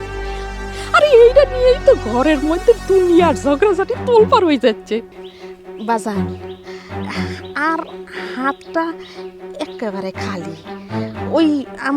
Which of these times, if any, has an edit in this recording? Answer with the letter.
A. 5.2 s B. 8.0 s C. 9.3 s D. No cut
A